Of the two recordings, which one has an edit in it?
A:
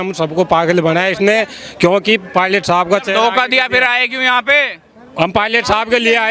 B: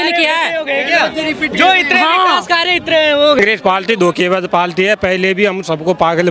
B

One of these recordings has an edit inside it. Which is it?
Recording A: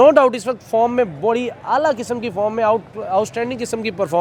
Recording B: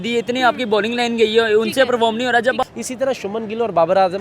B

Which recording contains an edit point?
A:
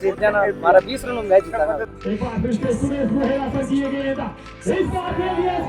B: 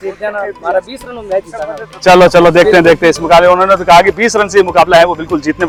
A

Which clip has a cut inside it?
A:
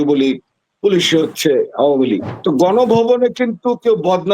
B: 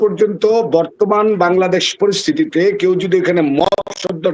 A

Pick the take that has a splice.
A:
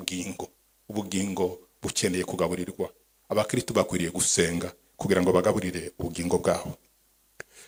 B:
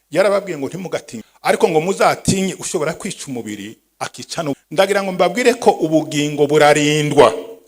B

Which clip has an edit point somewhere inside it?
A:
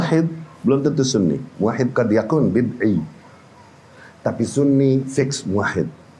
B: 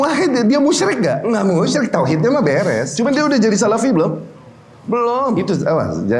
B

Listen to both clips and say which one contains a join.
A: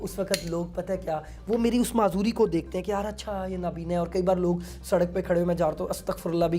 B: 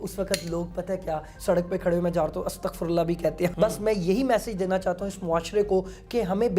B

